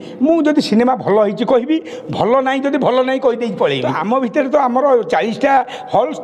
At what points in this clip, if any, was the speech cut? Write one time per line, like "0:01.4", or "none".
0:03.9